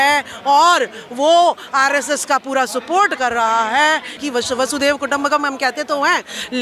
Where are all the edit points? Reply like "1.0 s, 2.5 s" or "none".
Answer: 4.1 s